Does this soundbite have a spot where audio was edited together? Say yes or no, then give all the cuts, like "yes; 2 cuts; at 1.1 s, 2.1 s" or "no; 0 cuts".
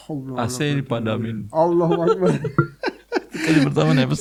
no; 0 cuts